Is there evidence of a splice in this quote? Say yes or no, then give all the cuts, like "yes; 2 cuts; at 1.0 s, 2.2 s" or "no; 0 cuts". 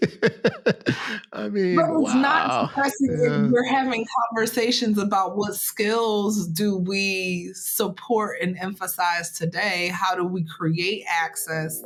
no; 0 cuts